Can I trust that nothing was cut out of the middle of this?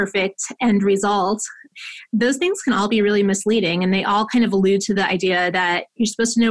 yes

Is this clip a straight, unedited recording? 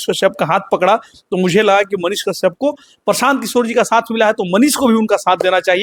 yes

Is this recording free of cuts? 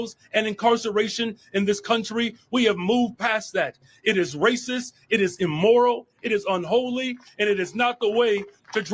yes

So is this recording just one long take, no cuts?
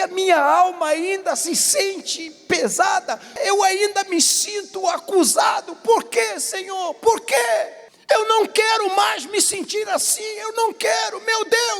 no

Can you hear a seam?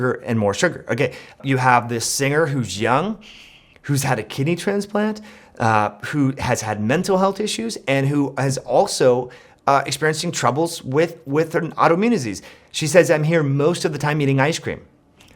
yes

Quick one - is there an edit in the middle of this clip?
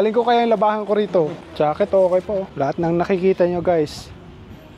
yes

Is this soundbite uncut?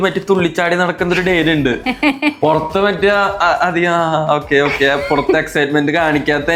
yes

